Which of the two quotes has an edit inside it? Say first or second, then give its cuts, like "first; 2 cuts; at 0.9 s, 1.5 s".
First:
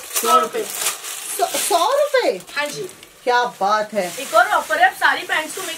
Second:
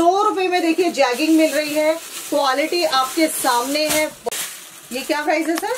second; 1 cut; at 4.2 s